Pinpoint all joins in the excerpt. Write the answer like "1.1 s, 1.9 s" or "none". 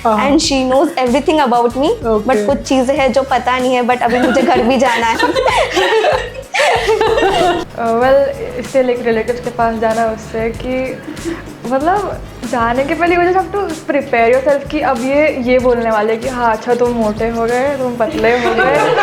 5.2 s, 7.6 s